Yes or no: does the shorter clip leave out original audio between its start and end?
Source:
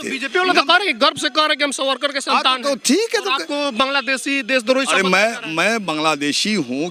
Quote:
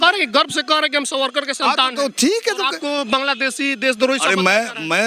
no